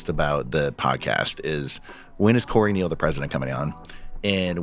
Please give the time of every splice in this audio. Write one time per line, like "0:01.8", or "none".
none